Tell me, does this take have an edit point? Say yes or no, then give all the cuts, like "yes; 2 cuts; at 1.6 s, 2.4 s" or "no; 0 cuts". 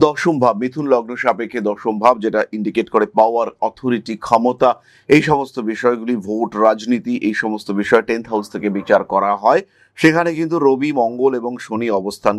no; 0 cuts